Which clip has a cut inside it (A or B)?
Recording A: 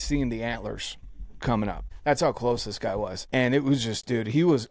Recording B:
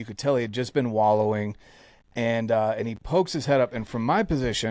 A